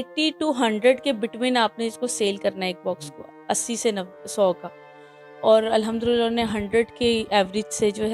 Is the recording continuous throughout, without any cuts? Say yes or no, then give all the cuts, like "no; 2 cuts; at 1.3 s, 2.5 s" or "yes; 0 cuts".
yes; 0 cuts